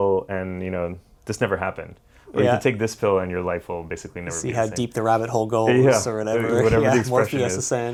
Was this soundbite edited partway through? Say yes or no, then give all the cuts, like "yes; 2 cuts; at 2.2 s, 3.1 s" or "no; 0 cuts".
no; 0 cuts